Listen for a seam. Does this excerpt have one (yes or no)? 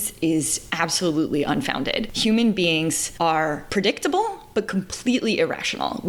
yes